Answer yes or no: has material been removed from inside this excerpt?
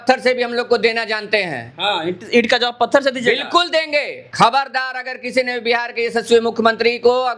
yes